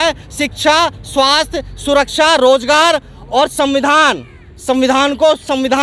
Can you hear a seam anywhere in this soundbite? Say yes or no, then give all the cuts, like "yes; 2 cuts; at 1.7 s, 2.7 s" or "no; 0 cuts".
no; 0 cuts